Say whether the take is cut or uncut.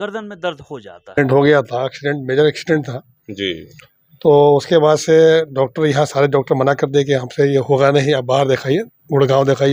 cut